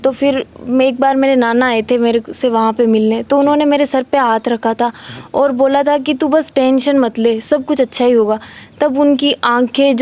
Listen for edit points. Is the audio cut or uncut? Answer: uncut